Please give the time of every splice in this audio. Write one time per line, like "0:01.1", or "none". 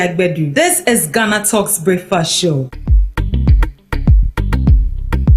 0:02.9

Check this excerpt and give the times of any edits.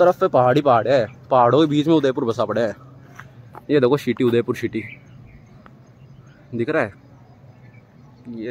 none

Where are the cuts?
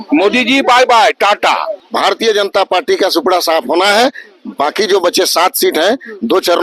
0:01.8

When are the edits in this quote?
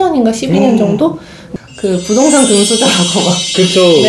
0:01.4

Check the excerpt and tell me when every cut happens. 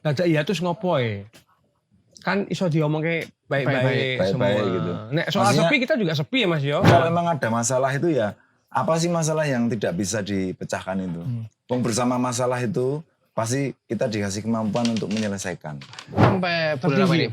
0:06.9
0:16.2

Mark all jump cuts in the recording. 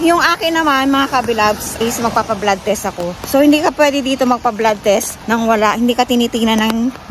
0:01.7
0:03.1
0:05.1

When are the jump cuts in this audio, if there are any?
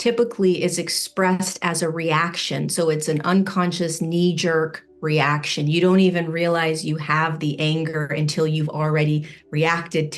none

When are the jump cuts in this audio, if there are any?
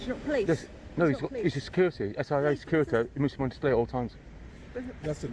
none

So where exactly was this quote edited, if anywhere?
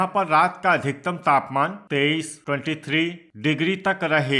0:01.8
0:03.2

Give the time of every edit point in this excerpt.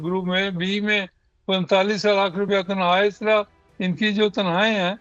none

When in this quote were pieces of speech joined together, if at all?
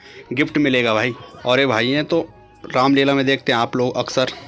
0:01.3

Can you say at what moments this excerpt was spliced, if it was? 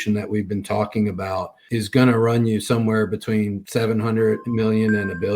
0:01.6
0:03.6
0:04.5

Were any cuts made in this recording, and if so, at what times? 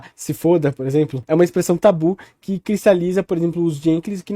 0:01.2

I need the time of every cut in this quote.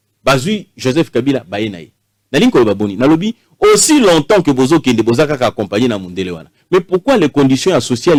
none

